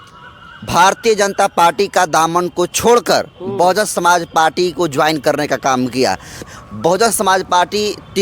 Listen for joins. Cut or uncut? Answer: cut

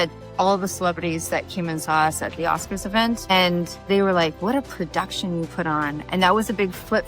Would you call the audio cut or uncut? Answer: cut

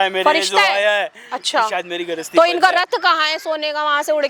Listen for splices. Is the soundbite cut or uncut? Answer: uncut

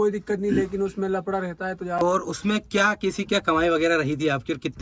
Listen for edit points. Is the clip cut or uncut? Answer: cut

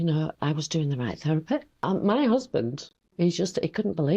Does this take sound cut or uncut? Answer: cut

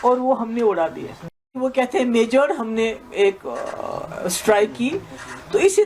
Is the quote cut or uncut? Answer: cut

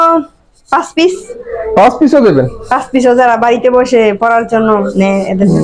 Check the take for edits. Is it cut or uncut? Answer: uncut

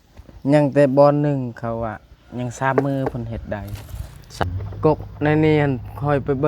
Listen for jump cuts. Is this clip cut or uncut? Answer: cut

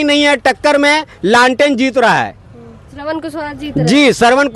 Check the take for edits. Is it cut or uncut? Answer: uncut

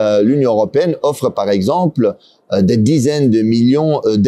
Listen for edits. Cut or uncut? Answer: uncut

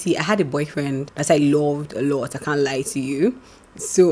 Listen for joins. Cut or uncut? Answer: cut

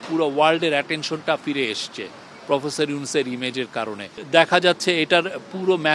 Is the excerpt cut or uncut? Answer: uncut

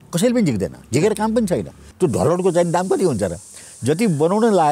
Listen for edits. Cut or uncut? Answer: cut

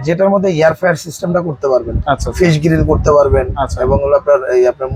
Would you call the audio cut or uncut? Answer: uncut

